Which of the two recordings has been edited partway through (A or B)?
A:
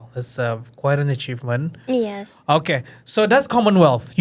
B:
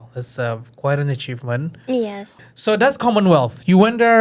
B